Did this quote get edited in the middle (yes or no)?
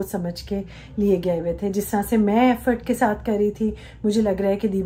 no